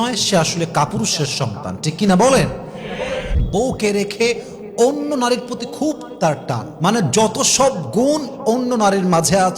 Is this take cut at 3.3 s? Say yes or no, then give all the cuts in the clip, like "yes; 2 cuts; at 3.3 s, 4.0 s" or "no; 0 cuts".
yes; 1 cut; at 3.3 s